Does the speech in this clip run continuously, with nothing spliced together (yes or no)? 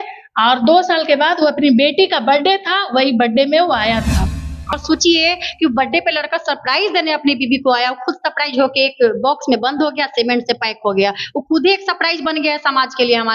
no